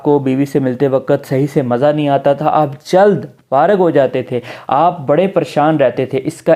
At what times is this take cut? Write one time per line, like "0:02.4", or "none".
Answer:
none